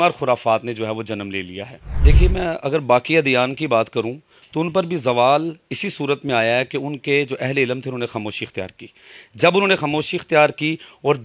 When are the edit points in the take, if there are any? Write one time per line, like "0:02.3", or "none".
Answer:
none